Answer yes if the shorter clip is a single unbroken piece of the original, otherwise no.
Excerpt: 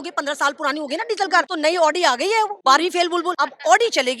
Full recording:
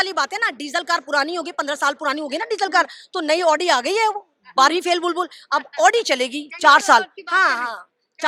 no